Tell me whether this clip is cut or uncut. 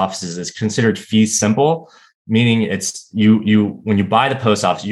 uncut